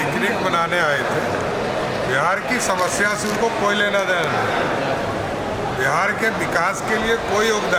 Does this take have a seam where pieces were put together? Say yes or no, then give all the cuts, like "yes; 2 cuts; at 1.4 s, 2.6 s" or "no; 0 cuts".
no; 0 cuts